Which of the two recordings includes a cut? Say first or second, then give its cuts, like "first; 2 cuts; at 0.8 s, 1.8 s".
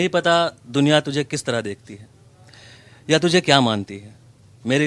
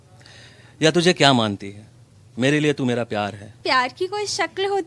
second; 1 cut; at 3.5 s